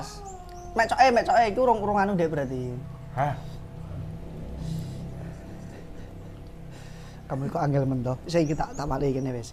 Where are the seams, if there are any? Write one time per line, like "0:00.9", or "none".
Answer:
none